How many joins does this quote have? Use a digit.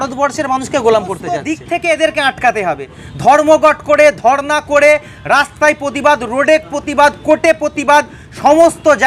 1